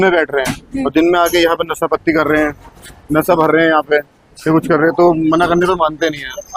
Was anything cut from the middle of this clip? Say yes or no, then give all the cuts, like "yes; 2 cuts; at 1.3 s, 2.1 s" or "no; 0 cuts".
no; 0 cuts